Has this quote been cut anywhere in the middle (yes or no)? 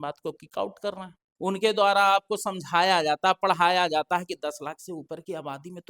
yes